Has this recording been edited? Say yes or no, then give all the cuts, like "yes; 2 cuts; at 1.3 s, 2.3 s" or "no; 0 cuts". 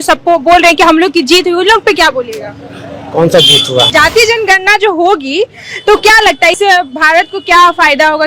yes; 1 cut; at 3.9 s